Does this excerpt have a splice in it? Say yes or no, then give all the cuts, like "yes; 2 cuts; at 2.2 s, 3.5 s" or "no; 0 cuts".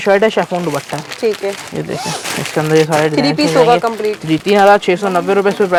no; 0 cuts